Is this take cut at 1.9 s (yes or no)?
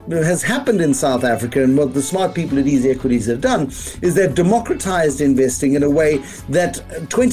yes